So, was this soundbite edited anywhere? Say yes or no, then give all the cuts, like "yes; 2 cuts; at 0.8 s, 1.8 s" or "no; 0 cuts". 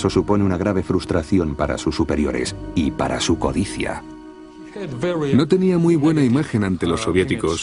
yes; 1 cut; at 2.4 s